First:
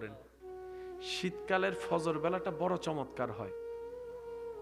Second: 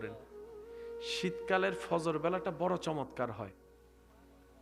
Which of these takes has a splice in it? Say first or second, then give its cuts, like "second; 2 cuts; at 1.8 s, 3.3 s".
first; 1 cut; at 3.7 s